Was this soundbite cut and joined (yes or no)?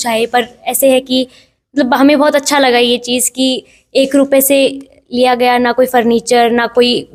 no